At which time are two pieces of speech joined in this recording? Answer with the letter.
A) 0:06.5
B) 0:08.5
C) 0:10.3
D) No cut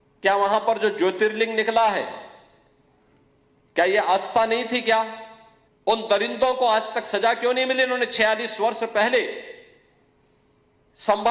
B